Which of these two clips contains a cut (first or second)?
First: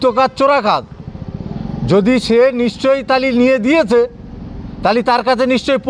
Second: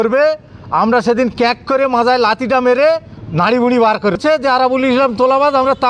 second